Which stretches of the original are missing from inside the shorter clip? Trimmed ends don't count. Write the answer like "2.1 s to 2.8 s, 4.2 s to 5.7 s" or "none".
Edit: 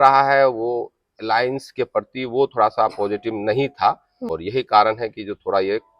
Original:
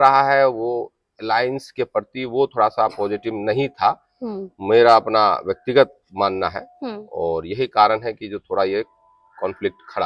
4.3 s to 7.4 s